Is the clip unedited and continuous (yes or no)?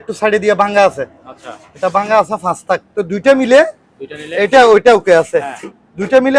yes